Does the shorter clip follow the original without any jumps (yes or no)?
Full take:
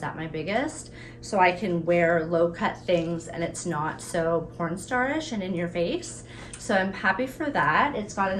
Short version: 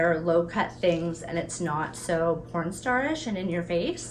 yes